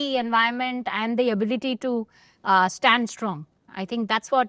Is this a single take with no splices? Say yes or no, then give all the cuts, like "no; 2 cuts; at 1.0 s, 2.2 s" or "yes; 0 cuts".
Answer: yes; 0 cuts